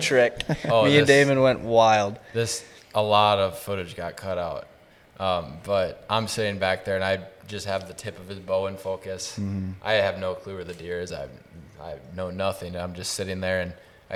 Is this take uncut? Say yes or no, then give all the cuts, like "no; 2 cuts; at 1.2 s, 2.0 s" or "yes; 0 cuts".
yes; 0 cuts